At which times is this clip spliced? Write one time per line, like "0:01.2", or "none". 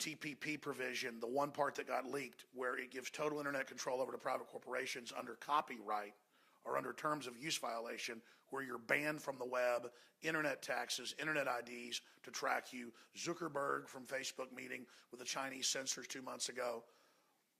none